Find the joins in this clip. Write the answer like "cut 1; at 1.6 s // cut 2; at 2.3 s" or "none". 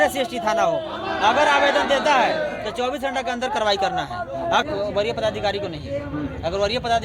cut 1; at 4.6 s